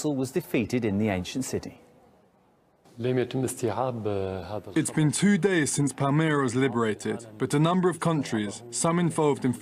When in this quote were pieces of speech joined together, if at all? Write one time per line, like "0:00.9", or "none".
0:07.0

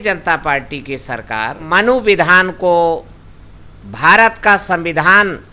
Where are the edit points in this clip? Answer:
0:01.6

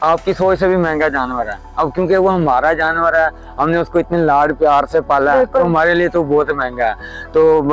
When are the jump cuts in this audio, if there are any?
none

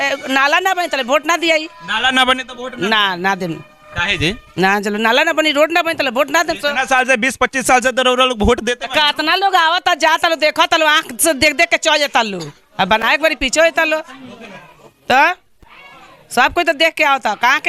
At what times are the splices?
none

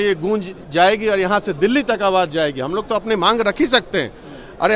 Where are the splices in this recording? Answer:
none

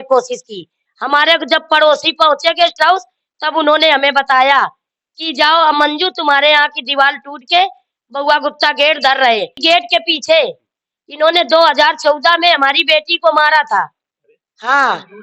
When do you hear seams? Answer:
0:09.6

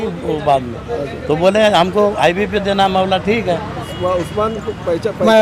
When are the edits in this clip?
0:03.8

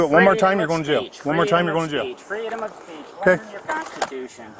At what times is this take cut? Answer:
0:03.6

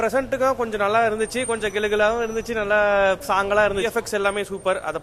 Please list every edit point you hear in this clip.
0:03.9

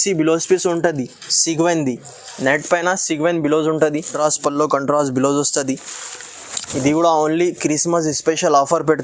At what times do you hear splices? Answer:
0:04.1

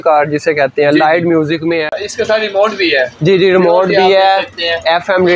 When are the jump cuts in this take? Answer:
0:01.9

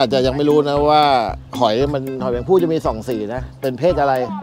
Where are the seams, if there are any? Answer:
0:03.5

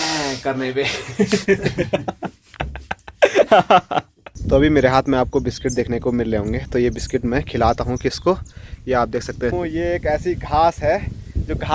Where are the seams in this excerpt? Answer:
0:04.3
0:09.5

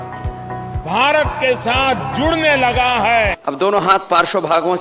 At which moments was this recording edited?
0:03.4

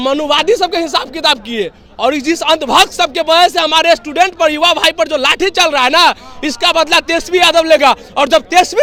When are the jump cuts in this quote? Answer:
none

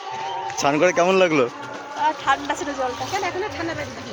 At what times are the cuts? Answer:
none

